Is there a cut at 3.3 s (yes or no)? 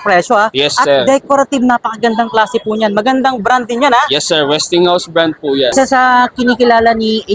no